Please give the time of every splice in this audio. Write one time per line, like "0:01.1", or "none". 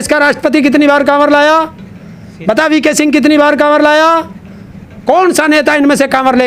none